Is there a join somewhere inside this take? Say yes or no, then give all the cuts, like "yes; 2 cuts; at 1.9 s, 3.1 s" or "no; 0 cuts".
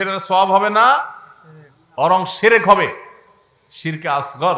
no; 0 cuts